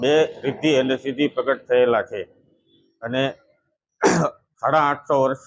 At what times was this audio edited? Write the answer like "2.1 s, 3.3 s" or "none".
none